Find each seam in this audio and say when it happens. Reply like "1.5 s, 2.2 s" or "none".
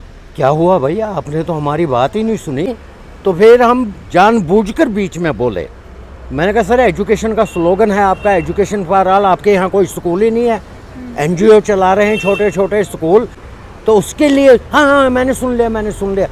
2.7 s, 13.5 s